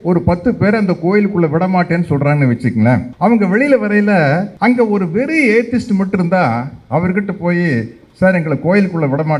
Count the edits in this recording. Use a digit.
2